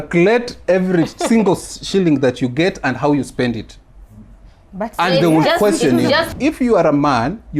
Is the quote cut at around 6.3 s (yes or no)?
yes